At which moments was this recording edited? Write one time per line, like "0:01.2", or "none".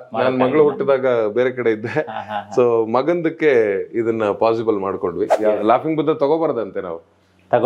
0:05.3